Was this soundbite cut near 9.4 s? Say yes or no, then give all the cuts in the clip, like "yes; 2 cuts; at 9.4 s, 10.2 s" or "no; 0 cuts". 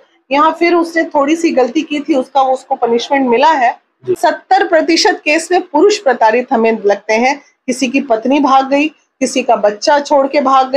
no; 1 cut; at 4.2 s